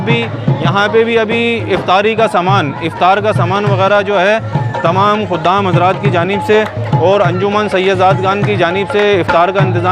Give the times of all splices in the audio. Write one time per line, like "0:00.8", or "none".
none